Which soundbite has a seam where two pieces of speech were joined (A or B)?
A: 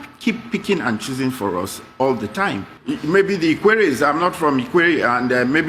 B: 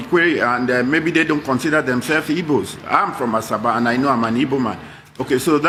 A